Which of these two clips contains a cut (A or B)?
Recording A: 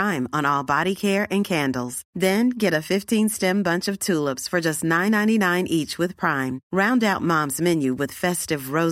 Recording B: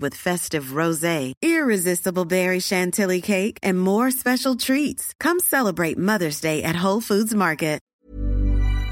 B